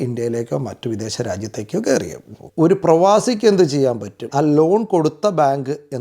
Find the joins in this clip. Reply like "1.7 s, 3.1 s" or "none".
2.4 s, 4.2 s